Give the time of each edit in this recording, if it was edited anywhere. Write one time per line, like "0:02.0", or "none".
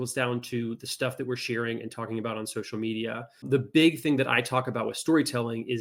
0:03.5